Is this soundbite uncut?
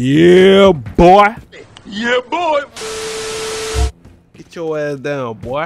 yes; 0 cuts

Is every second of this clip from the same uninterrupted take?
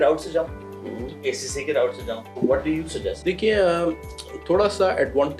no; 3 cuts; at 1.2 s, 2.3 s, 3.2 s

